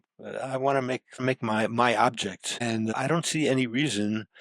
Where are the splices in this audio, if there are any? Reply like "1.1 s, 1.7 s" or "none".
1.2 s, 3.0 s